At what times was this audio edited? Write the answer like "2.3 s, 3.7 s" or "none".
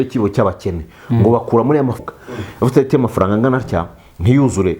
2.0 s